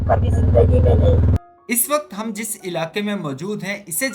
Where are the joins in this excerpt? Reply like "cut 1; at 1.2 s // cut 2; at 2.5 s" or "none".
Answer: cut 1; at 1.3 s